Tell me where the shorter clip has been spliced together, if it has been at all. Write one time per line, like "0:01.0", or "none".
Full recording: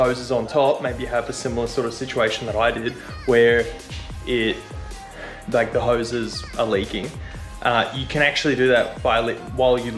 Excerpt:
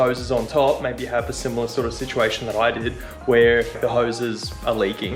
0:03.8